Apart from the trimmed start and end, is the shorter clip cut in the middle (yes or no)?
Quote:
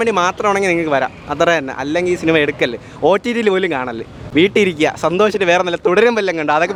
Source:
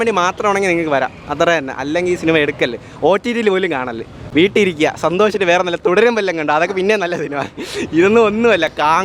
no